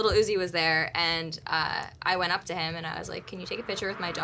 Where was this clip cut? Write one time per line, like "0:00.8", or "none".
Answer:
none

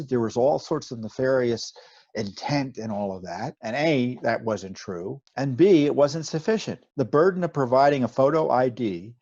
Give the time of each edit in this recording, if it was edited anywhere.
0:03.6
0:05.2
0:06.8
0:08.1

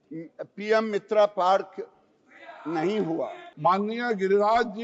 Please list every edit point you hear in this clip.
0:03.4

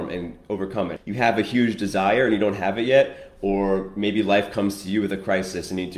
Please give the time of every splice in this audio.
0:00.9

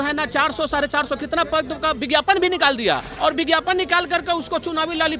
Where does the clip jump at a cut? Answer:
0:03.1

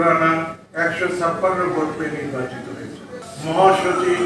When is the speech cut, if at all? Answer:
0:03.2

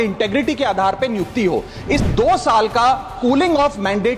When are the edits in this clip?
0:02.0

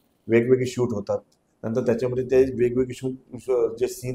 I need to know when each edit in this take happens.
none

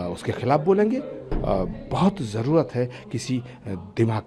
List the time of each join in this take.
0:01.2

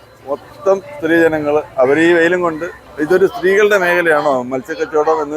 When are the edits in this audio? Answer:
0:02.8

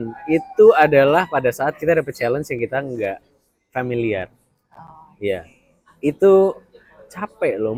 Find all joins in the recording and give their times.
none

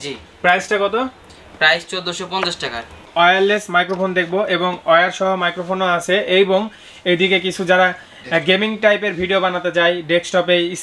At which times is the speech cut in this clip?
0:03.1

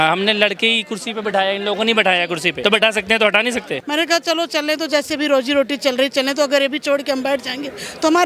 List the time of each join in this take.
0:02.5
0:03.8

